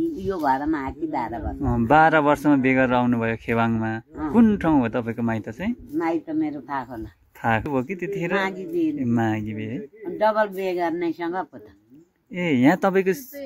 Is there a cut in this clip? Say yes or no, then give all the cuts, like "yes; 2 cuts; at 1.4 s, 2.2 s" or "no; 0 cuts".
yes; 1 cut; at 7.7 s